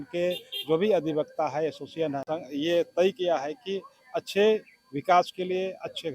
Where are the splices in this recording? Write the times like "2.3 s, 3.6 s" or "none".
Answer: 2.3 s